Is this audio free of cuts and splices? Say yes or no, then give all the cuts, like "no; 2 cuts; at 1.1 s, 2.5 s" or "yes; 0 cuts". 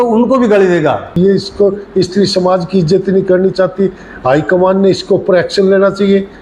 no; 1 cut; at 1.2 s